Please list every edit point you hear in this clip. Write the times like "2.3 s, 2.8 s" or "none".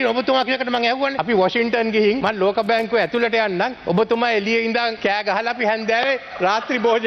1.2 s

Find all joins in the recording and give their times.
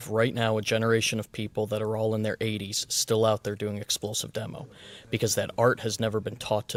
none

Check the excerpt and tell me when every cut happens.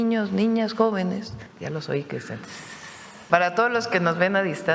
1.4 s, 3.2 s

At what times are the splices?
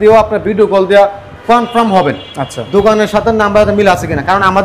none

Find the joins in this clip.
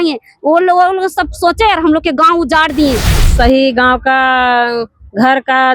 3.2 s

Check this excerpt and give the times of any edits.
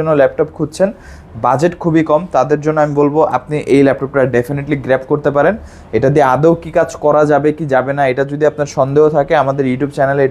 none

